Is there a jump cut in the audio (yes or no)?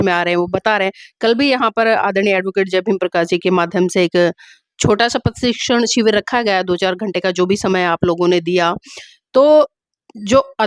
no